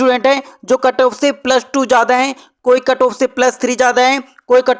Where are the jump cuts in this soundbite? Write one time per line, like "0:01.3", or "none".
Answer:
none